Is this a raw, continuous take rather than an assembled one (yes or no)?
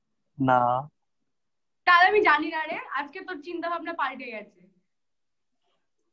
yes